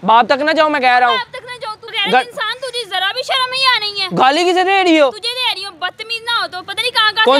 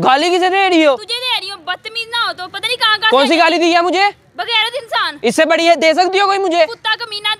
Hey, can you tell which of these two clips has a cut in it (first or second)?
first